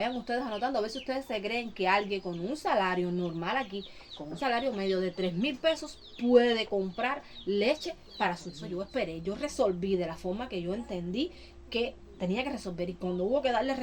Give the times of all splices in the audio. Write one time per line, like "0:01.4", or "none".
0:08.6